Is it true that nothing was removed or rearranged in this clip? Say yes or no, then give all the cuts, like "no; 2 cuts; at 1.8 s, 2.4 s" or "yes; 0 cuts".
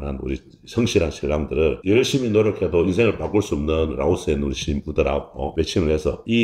yes; 0 cuts